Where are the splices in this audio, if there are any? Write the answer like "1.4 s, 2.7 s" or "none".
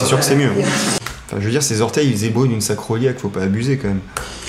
1.0 s